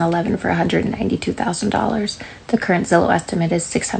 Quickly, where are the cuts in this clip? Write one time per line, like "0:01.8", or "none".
none